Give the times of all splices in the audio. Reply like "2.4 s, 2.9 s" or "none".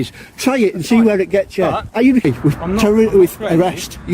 2.2 s